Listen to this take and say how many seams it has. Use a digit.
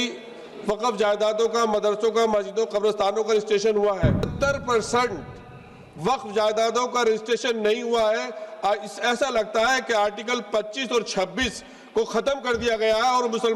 1